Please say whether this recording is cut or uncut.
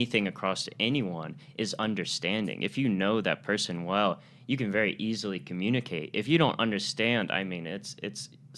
uncut